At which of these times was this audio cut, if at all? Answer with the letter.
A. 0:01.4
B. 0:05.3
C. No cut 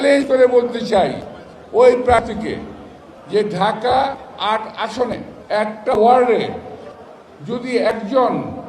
B